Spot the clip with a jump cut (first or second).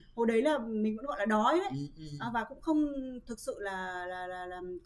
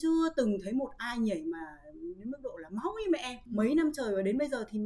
second